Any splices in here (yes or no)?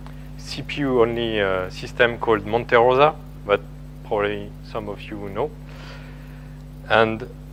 no